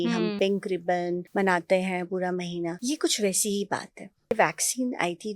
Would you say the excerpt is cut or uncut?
cut